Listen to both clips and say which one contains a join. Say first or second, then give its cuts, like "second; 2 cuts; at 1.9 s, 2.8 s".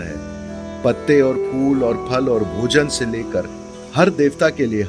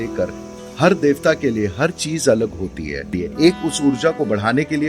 second; 1 cut; at 3.2 s